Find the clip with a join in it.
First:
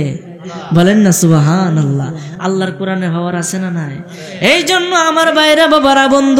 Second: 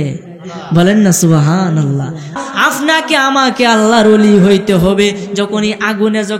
second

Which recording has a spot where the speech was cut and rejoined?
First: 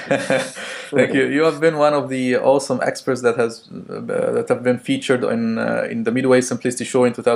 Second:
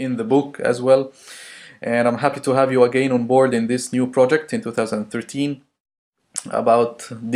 first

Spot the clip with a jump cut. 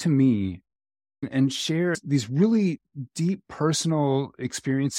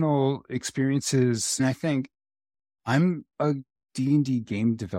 first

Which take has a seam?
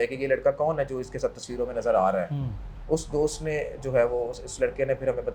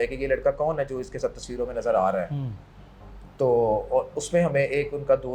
first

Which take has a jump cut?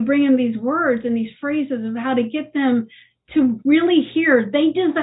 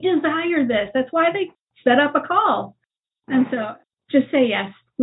second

